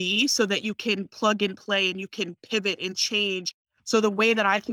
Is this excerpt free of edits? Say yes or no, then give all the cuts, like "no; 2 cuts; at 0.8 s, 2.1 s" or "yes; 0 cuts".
no; 1 cut; at 3.6 s